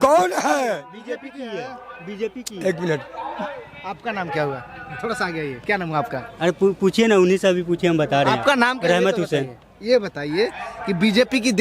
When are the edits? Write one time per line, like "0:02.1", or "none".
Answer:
none